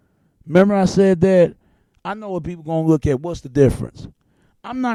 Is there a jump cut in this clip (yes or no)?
no